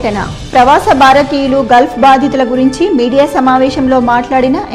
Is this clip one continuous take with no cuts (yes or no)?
yes